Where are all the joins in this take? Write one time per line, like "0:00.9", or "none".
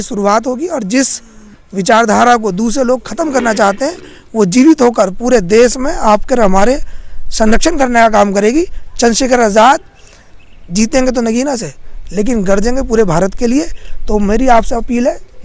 none